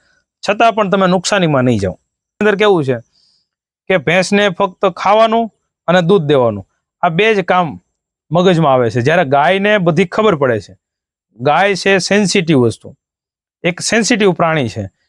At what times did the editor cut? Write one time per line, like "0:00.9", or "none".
0:02.4